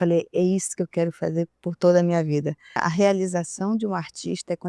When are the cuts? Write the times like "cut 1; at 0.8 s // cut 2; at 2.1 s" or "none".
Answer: cut 1; at 2.8 s

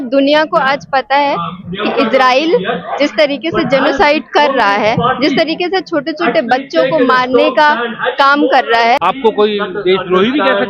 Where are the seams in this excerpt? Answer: cut 1; at 9.0 s

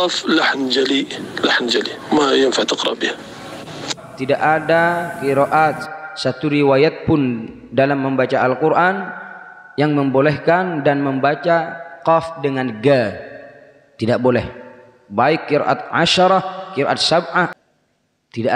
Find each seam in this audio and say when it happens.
cut 1; at 17.6 s

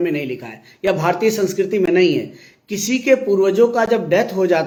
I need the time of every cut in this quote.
none

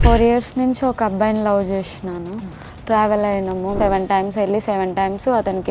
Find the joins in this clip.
cut 1; at 3.8 s

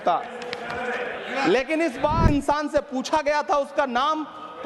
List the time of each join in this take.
cut 1; at 2.3 s

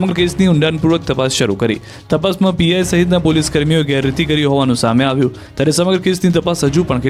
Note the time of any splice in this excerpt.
none

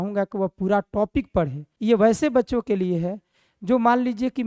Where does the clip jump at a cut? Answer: cut 1; at 1.6 s

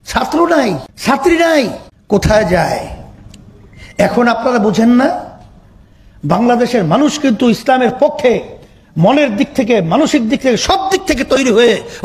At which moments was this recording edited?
cut 1; at 0.9 s // cut 2; at 1.9 s

